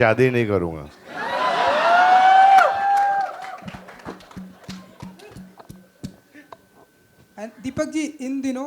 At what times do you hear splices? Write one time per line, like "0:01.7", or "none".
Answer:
none